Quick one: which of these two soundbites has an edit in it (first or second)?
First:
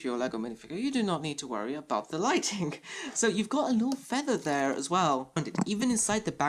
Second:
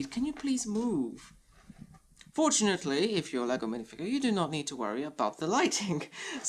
first